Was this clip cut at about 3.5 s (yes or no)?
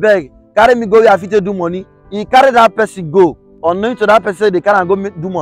yes